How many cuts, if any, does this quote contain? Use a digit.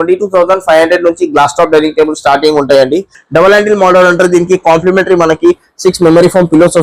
1